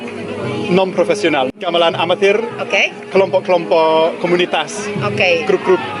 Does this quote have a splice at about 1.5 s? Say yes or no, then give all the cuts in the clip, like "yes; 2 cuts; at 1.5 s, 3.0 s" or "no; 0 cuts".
yes; 1 cut; at 1.5 s